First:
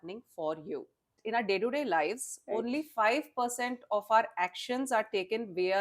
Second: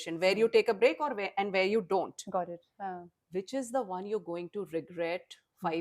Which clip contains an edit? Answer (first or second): first